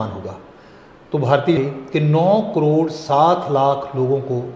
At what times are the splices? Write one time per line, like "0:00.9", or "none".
0:01.6